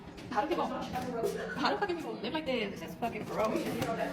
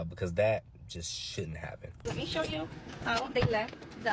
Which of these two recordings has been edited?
second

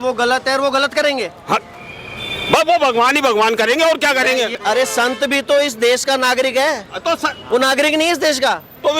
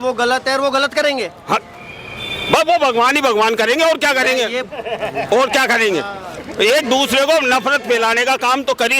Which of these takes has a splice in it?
first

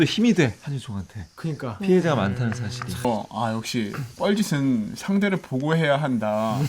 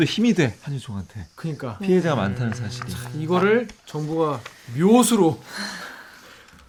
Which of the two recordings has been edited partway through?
first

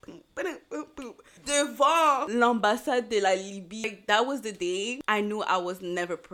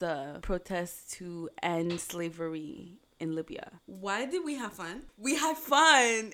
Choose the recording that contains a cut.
first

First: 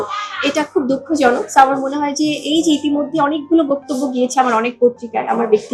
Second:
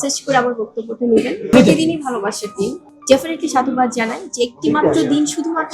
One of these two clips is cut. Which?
second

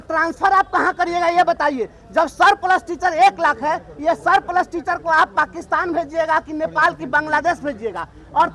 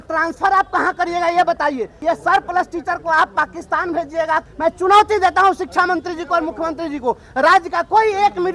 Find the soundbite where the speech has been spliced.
second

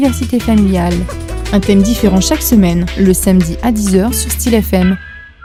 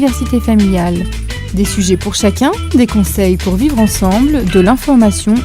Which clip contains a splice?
second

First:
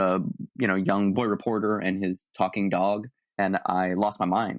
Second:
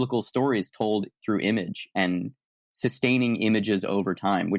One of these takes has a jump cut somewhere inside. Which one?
first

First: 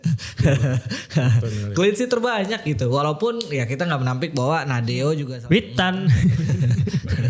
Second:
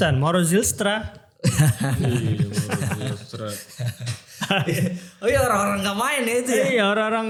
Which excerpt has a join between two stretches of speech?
first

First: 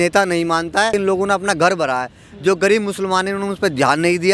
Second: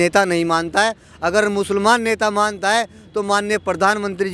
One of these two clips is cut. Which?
first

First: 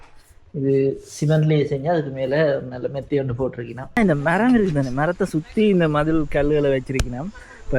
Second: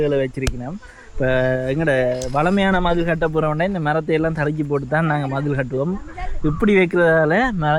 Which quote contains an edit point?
first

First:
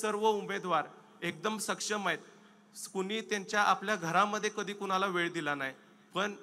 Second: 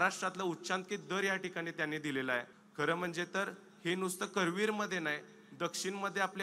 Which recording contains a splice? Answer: second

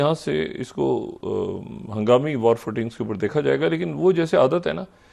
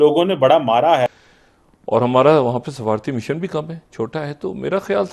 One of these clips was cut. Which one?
second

